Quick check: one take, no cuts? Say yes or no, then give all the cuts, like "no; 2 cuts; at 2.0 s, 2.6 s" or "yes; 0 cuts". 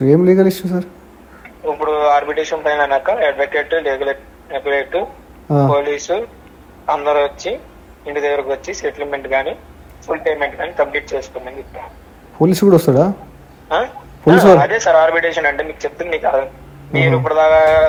yes; 0 cuts